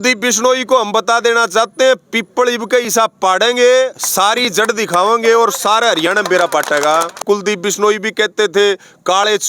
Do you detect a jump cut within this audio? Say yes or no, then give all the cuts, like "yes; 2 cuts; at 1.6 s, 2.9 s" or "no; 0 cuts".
yes; 1 cut; at 7.2 s